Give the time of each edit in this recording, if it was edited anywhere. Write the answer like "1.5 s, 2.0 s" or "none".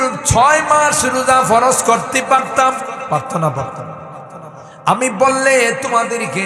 none